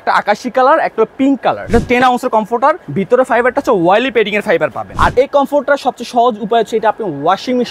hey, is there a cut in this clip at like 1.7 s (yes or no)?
yes